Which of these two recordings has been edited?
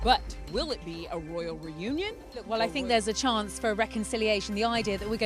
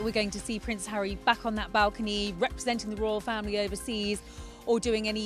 first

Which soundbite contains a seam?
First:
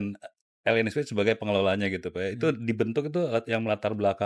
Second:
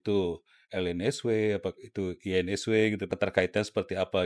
second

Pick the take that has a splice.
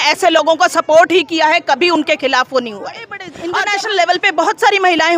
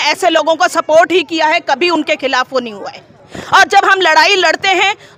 first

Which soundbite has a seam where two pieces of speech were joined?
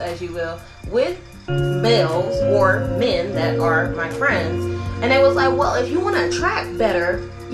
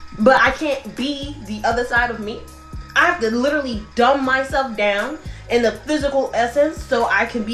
first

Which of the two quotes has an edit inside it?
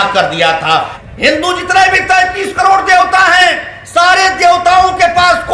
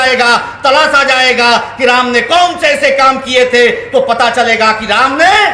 first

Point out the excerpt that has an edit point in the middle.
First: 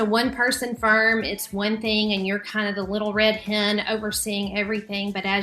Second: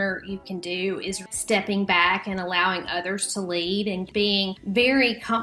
second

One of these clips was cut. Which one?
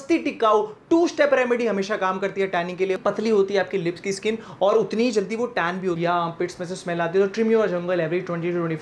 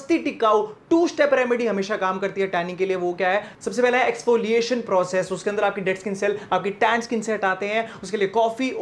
first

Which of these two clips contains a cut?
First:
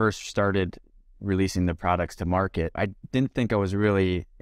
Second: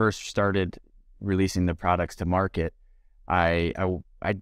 first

